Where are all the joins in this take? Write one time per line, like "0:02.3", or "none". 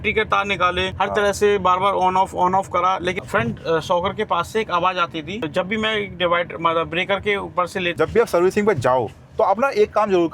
0:00.9
0:03.2
0:05.5
0:07.9